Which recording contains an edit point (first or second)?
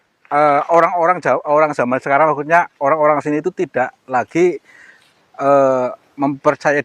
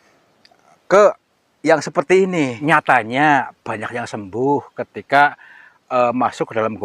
second